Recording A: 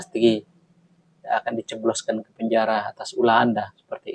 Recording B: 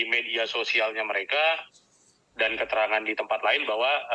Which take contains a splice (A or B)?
A